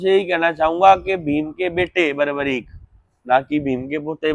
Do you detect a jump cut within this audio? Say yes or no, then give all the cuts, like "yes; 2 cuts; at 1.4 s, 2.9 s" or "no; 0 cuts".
no; 0 cuts